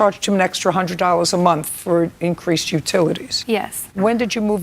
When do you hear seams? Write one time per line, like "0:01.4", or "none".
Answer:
0:03.6